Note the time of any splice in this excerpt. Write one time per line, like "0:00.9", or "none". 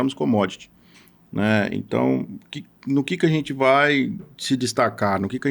none